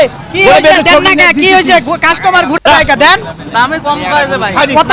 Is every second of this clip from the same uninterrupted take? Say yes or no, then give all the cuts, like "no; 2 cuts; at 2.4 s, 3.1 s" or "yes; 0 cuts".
yes; 0 cuts